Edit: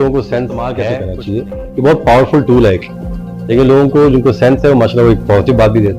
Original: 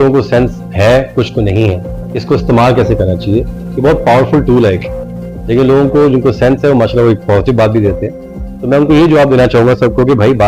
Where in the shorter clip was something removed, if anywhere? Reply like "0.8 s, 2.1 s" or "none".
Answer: 0.9 s